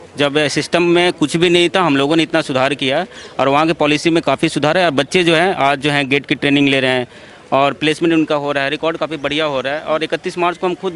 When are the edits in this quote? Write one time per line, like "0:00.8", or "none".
none